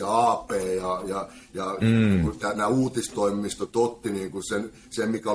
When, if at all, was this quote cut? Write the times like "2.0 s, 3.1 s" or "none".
none